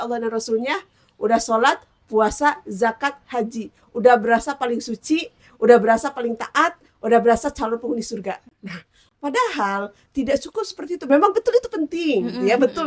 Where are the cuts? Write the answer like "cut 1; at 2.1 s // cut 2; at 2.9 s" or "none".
none